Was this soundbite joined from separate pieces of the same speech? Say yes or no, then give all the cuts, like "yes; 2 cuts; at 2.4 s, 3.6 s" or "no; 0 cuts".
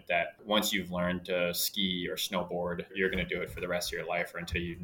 no; 0 cuts